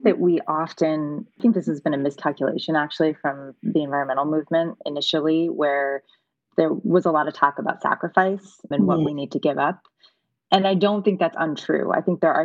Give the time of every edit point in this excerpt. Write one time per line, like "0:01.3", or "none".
0:01.4